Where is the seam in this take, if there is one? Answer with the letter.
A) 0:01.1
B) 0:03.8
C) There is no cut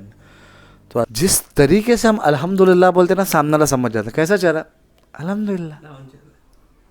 A